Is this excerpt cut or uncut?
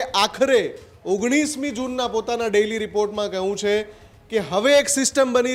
uncut